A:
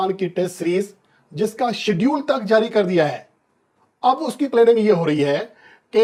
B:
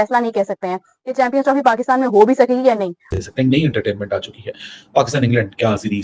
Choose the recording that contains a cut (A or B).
B